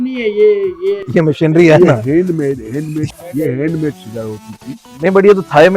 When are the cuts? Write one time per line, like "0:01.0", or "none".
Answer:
0:03.1